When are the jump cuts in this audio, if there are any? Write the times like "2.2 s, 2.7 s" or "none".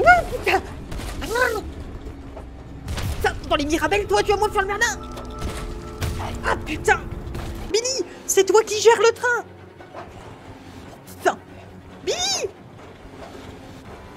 7.7 s